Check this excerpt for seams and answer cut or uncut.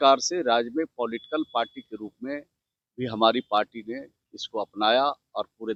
uncut